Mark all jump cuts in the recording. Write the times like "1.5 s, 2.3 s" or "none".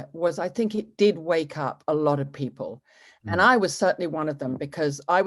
none